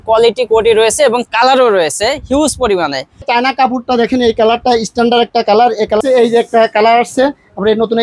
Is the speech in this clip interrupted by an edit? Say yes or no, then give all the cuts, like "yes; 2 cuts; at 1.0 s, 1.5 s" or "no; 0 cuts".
yes; 2 cuts; at 3.3 s, 6.0 s